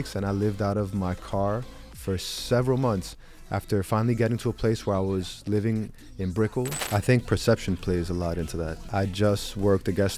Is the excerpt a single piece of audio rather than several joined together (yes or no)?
no